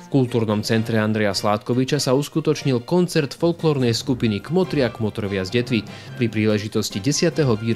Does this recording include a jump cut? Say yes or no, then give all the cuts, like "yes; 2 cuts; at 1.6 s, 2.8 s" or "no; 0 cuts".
no; 0 cuts